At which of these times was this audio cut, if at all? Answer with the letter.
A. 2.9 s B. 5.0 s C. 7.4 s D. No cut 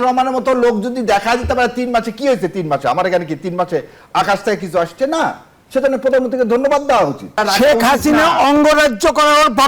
C